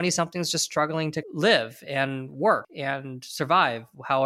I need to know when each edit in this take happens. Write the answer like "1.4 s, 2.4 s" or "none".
2.7 s